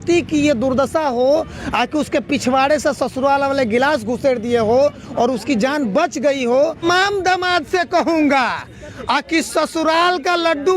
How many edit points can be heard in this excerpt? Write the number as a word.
one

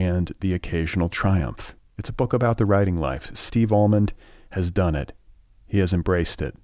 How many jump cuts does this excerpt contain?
zero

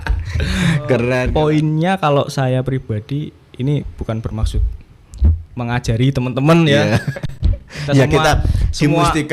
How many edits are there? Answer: one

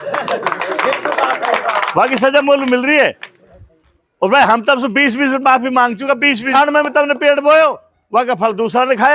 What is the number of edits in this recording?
one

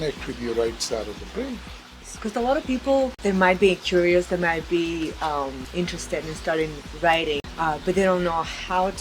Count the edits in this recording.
four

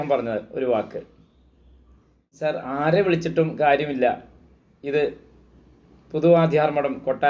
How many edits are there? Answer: one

